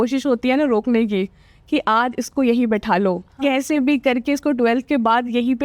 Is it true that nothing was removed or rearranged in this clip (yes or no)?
yes